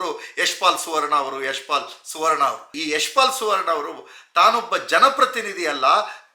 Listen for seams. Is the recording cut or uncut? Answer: cut